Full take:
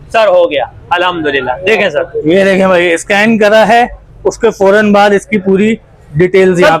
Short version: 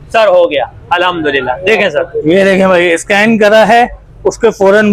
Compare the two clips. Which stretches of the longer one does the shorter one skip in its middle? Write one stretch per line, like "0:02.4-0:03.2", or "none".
none